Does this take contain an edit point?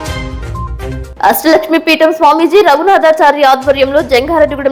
no; 0 cuts

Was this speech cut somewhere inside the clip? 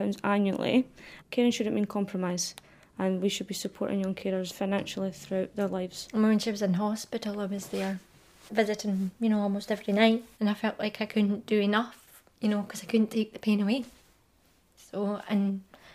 yes; 3 cuts; at 1.0 s, 6.0 s, 10.3 s

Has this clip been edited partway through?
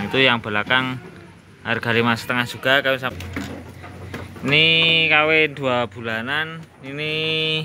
yes; 1 cut; at 3.1 s

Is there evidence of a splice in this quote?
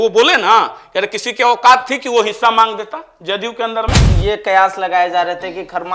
yes; 1 cut; at 4.1 s

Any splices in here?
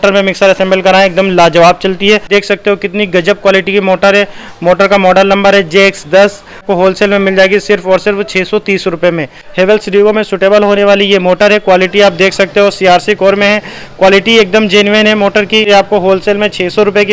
yes; 4 cuts; at 2.3 s, 6.7 s, 9.5 s, 15.7 s

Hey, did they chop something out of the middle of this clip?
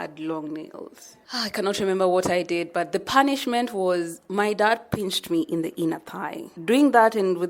yes; 1 cut; at 6.5 s

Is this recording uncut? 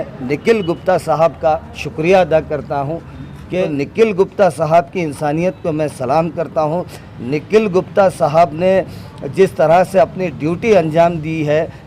no; 1 cut; at 3.7 s

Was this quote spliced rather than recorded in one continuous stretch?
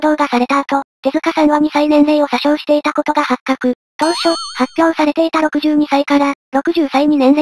no; 0 cuts

